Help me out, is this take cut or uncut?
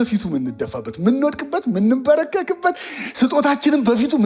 uncut